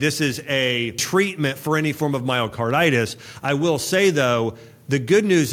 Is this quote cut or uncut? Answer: cut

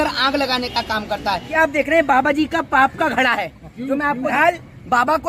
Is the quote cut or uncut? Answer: cut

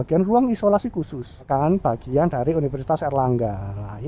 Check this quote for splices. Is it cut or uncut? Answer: cut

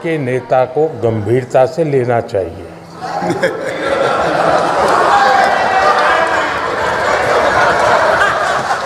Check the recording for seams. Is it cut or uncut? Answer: uncut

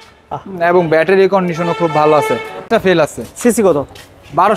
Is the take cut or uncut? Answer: cut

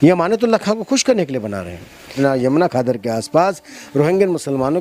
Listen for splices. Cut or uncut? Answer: cut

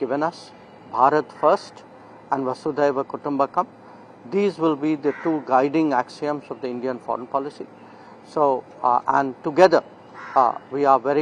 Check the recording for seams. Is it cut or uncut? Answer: uncut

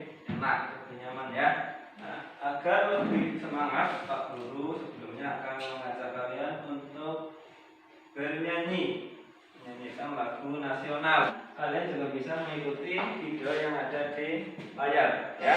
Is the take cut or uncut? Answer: cut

